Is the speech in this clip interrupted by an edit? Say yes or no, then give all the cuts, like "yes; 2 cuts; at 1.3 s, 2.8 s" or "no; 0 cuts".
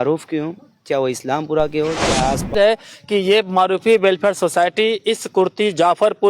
yes; 1 cut; at 2.5 s